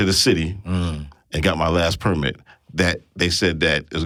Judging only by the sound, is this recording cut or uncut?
uncut